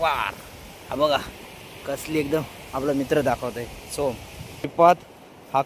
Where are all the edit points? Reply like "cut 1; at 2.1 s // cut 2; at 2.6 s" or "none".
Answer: cut 1; at 4.7 s